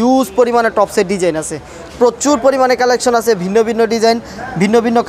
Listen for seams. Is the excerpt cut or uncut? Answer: uncut